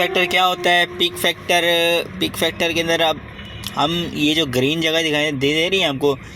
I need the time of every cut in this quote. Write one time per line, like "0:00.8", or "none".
none